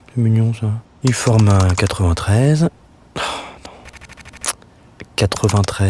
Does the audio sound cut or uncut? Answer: uncut